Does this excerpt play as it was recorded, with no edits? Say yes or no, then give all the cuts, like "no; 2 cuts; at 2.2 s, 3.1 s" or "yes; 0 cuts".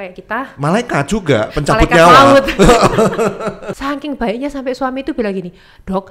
no; 1 cut; at 3.7 s